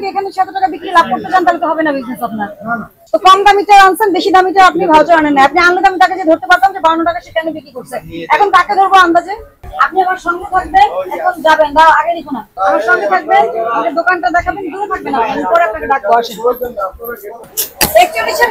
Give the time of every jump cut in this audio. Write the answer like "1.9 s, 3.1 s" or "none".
3.0 s, 9.5 s, 17.4 s